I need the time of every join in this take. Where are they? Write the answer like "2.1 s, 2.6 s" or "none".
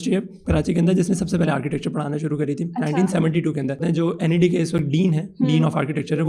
3.8 s